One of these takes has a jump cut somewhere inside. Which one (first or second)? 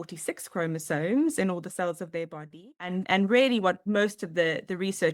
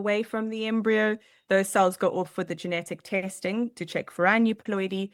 first